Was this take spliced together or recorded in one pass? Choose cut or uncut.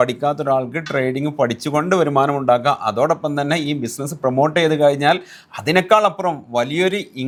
uncut